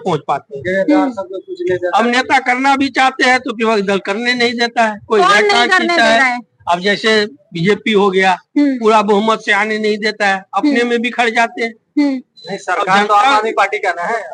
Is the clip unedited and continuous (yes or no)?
yes